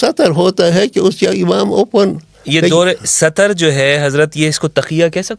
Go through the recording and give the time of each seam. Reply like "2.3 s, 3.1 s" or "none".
none